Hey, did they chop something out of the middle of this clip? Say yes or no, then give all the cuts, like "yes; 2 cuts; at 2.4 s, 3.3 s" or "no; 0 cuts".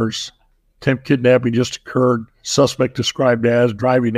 yes; 1 cut; at 2.4 s